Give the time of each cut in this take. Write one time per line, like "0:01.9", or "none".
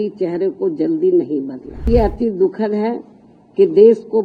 0:01.9